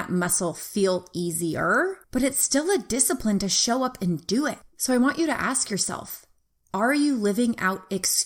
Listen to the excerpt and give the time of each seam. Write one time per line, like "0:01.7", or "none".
none